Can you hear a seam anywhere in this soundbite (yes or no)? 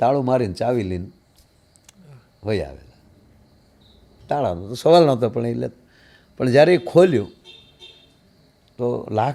no